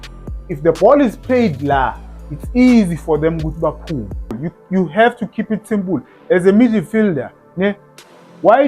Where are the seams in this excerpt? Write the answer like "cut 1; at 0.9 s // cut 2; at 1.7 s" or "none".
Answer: cut 1; at 4.4 s